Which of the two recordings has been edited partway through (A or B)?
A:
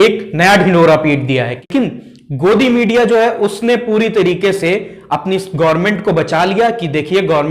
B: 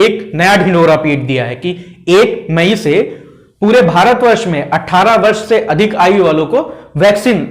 A